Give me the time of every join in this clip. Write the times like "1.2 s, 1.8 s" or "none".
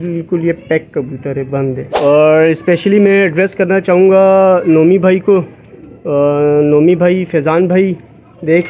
1.8 s